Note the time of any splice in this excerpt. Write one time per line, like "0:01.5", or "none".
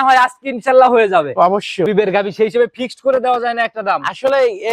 0:01.9

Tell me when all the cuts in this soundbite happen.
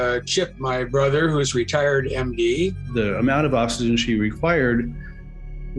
0:02.8

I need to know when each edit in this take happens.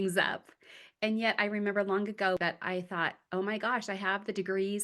0:02.4

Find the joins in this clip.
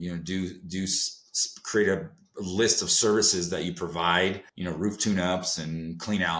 0:04.5

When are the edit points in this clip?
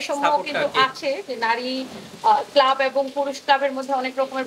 none

